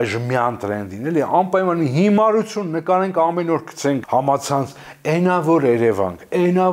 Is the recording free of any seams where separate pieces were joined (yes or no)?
no